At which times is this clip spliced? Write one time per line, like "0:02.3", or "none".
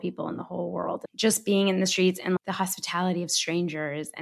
0:01.0
0:02.4